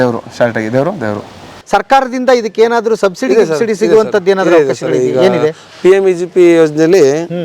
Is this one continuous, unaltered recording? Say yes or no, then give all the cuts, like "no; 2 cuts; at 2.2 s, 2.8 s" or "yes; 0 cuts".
no; 1 cut; at 1.5 s